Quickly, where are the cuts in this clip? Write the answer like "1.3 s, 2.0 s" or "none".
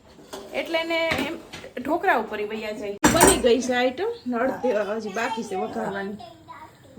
3.0 s